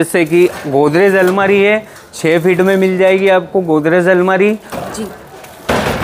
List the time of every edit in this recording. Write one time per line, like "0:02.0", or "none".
none